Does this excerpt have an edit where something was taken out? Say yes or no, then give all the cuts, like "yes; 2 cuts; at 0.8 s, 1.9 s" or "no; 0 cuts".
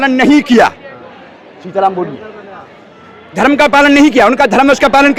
no; 0 cuts